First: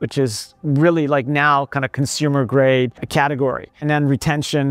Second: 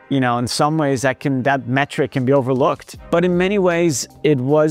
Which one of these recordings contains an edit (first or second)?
second